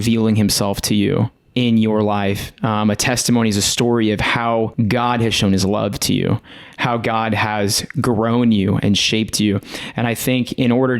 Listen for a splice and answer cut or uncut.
cut